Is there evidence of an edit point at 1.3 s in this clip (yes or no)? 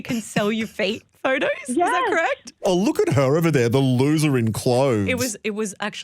no